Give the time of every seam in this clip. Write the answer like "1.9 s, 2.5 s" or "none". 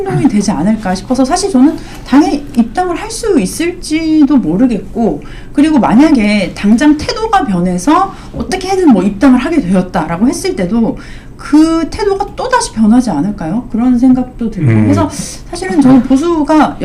none